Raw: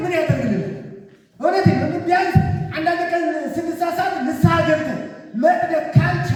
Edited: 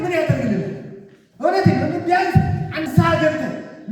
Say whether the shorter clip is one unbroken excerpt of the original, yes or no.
no